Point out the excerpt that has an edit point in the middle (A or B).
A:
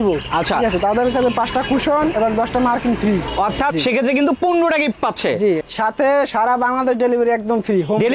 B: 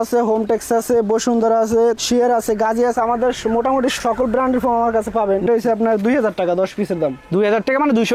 B